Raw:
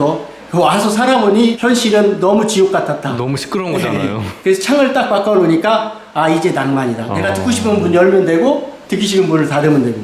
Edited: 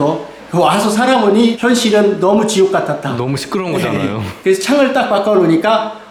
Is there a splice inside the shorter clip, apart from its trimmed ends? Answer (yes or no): no